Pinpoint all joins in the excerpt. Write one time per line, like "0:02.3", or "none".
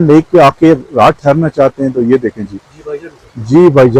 none